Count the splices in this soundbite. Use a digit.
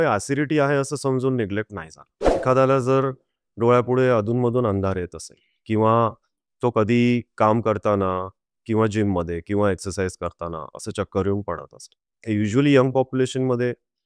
1